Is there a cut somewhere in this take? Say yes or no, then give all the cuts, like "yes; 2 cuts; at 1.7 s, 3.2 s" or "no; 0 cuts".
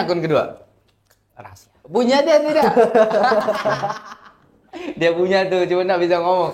no; 0 cuts